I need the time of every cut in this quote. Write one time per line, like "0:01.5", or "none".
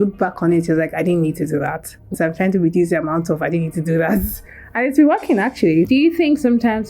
0:02.1
0:05.9